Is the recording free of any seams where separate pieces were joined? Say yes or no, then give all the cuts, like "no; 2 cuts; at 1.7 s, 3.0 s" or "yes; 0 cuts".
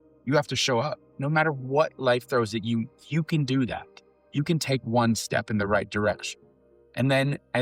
no; 1 cut; at 1.0 s